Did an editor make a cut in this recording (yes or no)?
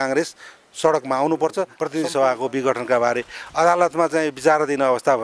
yes